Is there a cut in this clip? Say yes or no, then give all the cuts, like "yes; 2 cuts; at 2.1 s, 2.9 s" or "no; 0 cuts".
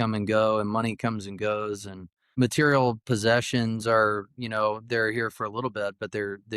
yes; 1 cut; at 2.3 s